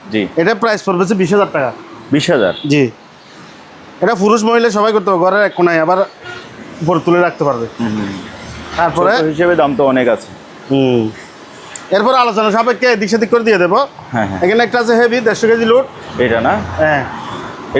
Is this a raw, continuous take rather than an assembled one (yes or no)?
yes